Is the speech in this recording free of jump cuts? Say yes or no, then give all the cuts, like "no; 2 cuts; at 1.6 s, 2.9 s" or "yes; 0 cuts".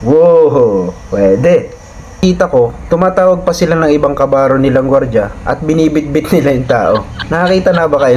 no; 1 cut; at 2.2 s